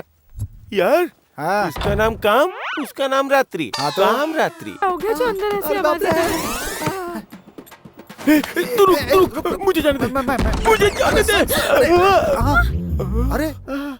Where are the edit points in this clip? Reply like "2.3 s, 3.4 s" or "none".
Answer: 4.8 s